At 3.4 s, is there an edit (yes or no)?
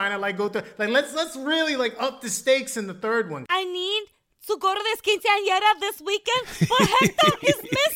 yes